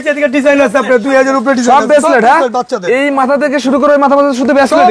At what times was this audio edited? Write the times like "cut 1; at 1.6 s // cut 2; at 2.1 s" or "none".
none